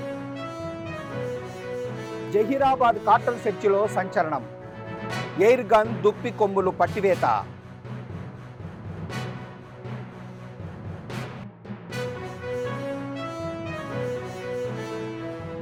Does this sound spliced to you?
no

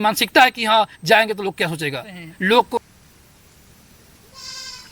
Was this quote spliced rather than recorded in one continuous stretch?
yes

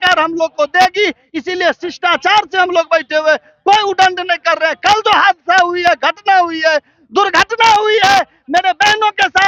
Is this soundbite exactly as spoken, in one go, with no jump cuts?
yes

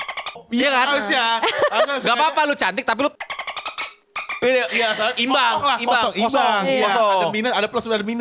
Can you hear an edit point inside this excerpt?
no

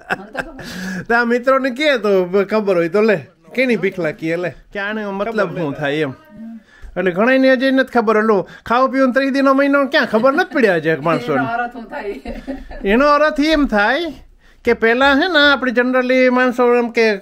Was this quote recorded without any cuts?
no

